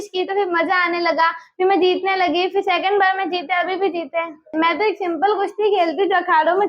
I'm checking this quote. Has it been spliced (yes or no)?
yes